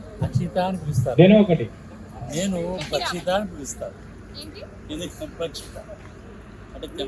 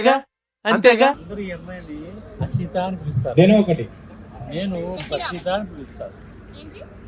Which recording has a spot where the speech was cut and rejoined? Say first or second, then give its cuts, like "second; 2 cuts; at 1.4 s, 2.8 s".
second; 1 cut; at 1.2 s